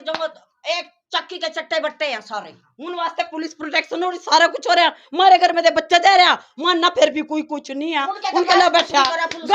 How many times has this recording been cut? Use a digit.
0